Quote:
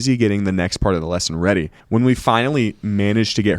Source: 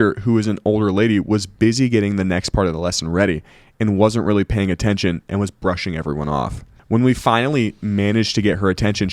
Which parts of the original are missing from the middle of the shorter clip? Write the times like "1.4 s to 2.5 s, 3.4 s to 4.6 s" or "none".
3.5 s to 6.8 s